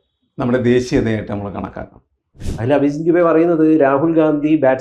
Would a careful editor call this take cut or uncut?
cut